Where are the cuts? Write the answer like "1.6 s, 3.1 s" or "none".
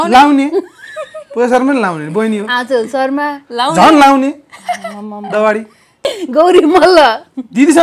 5.9 s